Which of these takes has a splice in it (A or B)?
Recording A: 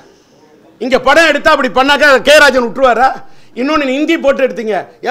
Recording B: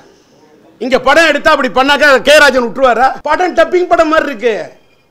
B